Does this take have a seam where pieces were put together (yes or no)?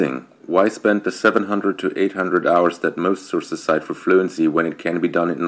no